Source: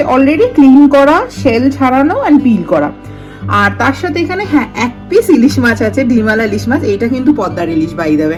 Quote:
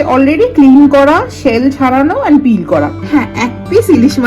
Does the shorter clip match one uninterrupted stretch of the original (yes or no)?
no